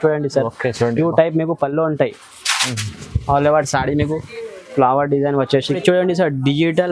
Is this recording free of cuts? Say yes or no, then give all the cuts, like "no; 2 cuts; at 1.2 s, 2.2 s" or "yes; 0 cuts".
no; 1 cut; at 5.7 s